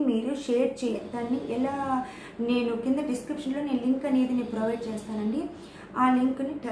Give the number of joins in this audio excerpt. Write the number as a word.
one